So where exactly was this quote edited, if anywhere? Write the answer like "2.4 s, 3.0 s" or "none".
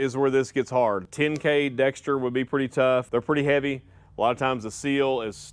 1.0 s, 3.1 s